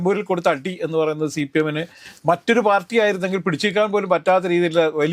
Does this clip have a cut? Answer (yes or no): no